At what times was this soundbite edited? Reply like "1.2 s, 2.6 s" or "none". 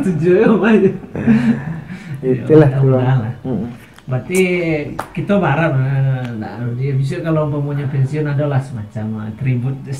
none

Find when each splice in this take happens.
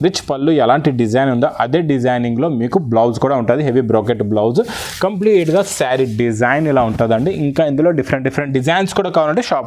none

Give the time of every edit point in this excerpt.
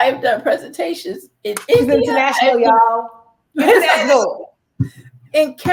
none

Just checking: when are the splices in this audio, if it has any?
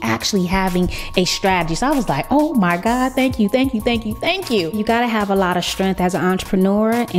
4.8 s

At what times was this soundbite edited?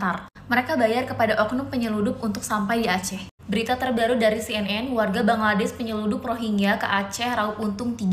none

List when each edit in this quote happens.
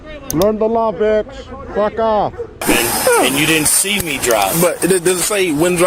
2.7 s

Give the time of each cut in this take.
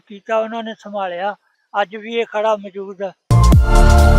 1.5 s, 3.2 s

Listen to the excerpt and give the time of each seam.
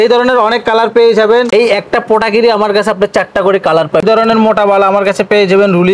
1.5 s, 4.0 s

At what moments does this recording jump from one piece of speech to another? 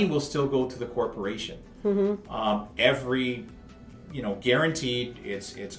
none

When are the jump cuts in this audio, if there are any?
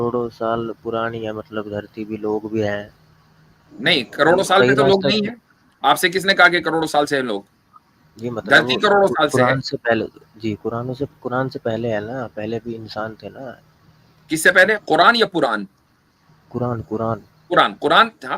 none

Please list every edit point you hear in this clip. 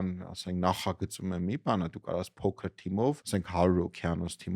3.2 s

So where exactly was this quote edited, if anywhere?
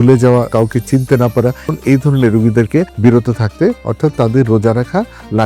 1.7 s, 2.9 s

